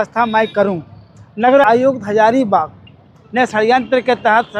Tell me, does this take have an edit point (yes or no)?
yes